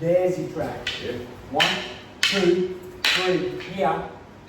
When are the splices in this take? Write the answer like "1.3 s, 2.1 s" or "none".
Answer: 1.3 s